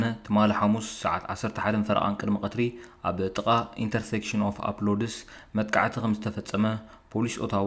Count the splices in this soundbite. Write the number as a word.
zero